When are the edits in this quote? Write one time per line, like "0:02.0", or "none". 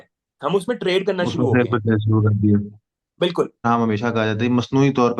0:03.6